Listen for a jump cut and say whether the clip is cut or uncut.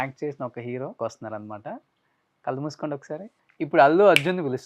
cut